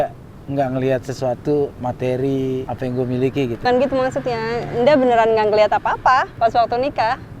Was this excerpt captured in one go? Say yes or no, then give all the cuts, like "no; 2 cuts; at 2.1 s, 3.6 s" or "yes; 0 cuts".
no; 3 cuts; at 2.7 s, 3.6 s, 6.3 s